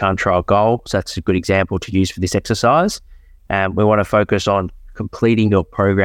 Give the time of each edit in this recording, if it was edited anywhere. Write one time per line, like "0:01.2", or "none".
none